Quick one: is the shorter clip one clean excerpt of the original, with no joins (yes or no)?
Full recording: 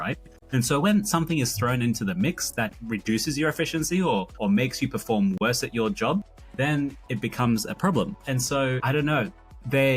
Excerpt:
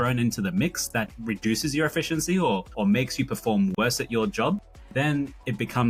yes